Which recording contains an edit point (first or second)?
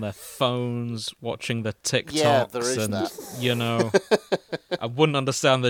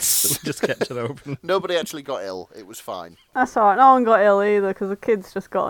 second